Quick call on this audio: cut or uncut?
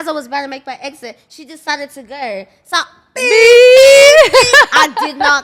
uncut